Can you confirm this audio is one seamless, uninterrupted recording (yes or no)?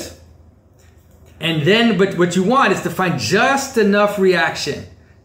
no